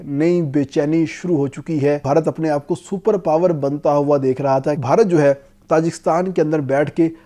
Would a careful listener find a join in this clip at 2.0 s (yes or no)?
yes